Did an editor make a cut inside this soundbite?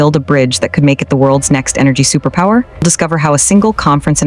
yes; 1 cut; at 2.8 s

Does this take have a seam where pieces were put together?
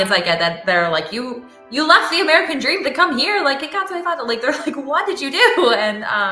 no; 0 cuts

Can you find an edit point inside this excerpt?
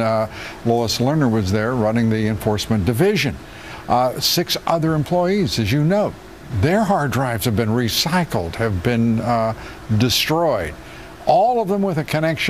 yes; 1 cut; at 5.2 s

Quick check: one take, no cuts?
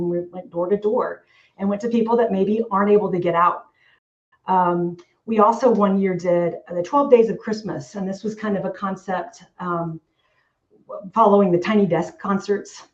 yes; 0 cuts

